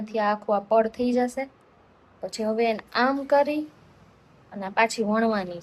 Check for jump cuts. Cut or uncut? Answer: uncut